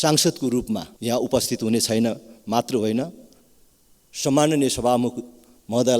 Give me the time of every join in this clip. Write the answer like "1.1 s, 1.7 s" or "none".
0.9 s